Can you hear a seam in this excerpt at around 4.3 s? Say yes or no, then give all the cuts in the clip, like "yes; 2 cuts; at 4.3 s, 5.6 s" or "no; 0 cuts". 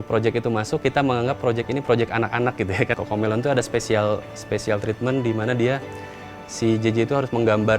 no; 1 cut; at 2.9 s